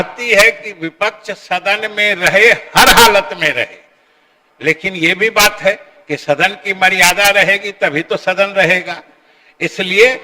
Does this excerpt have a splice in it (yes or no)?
no